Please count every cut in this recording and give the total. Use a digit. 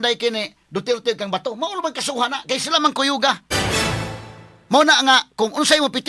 1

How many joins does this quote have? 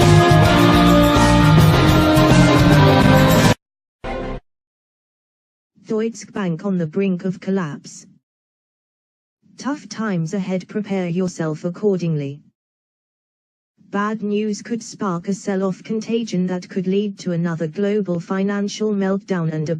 0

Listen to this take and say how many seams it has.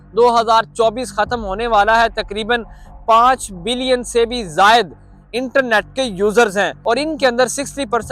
1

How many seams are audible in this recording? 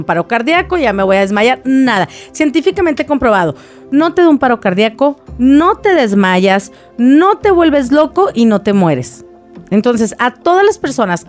0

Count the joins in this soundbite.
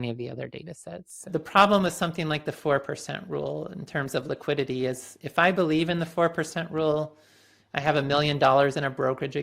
1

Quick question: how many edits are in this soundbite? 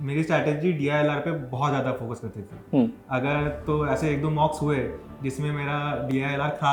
0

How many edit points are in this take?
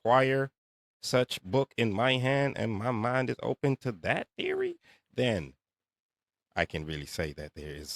0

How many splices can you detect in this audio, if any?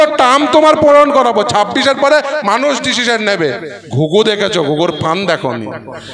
1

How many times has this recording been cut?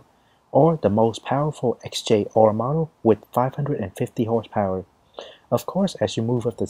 1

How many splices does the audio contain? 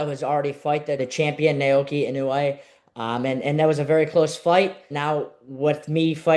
2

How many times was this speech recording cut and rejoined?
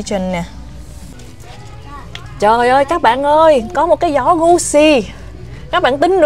1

